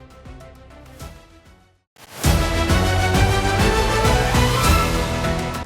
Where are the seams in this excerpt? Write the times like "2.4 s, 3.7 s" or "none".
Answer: 1.7 s